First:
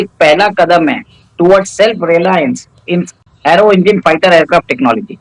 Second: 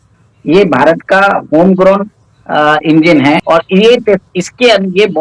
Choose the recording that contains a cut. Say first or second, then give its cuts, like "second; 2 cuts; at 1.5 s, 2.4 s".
second; 1 cut; at 3.4 s